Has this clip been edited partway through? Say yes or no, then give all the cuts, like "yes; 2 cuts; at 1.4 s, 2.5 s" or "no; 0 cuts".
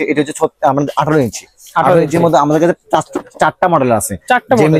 no; 0 cuts